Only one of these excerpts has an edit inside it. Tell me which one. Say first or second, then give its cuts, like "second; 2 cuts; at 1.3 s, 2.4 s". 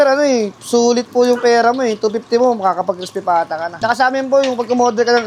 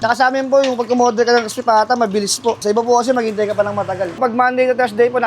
second; 2 cuts; at 2.6 s, 4.2 s